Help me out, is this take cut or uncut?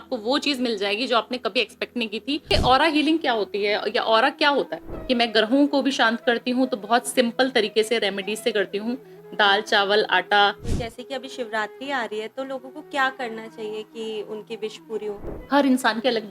cut